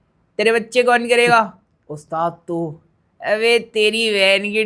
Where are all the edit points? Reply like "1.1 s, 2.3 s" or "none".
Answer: none

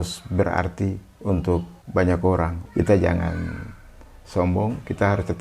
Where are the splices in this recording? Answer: 1.8 s, 2.6 s

